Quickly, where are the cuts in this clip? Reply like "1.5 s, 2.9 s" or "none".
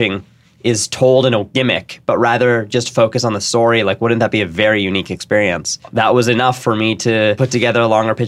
5.8 s, 7.4 s